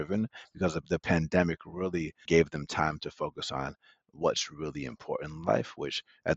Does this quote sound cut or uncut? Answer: cut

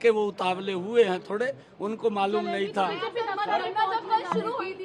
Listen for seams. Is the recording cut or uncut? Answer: uncut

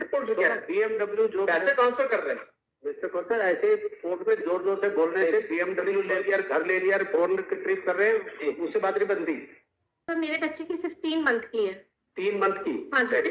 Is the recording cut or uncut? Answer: cut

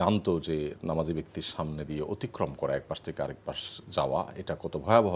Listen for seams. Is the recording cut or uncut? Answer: uncut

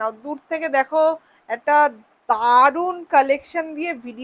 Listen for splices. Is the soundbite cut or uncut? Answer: uncut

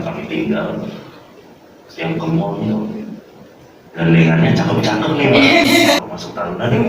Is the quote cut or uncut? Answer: cut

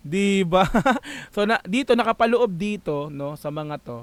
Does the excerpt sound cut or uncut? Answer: uncut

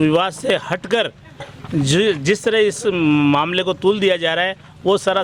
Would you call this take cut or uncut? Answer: uncut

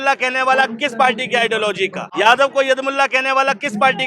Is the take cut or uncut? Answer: cut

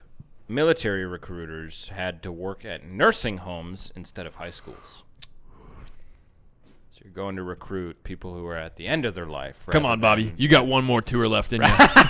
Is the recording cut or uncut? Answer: uncut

